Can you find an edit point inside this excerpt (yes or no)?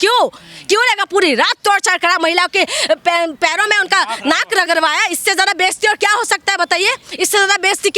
no